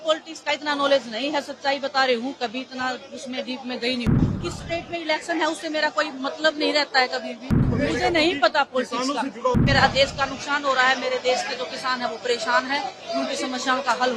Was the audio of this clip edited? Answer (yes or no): yes